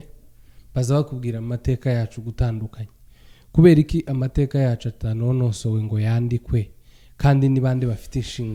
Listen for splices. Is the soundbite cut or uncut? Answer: uncut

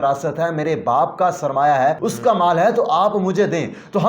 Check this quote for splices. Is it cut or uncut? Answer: cut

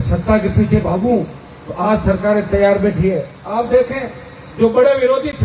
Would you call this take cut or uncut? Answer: cut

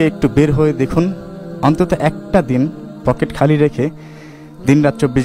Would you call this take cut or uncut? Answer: uncut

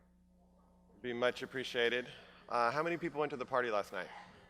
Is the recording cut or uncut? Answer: cut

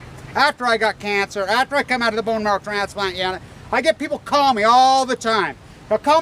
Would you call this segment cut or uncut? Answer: cut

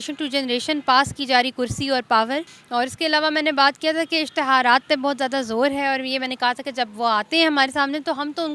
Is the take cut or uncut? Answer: cut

